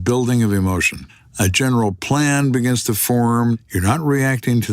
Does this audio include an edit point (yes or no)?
yes